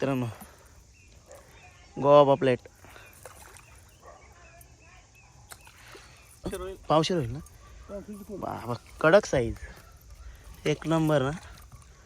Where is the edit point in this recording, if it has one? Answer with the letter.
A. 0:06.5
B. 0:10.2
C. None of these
A